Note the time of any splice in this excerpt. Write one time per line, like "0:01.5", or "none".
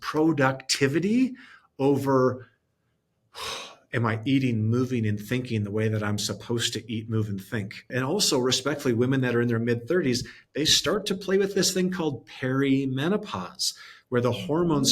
0:07.9